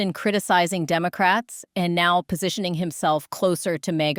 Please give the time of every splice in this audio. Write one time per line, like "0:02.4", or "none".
none